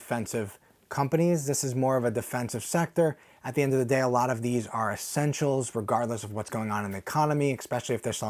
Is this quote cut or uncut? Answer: uncut